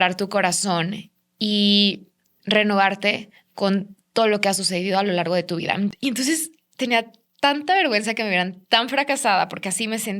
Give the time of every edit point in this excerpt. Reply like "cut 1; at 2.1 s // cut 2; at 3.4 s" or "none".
cut 1; at 5.9 s